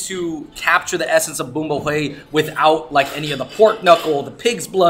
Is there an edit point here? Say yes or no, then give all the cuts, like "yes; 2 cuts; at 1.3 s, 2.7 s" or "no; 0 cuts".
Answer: no; 0 cuts